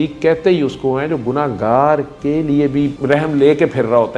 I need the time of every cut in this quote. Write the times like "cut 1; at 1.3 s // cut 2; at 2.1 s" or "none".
none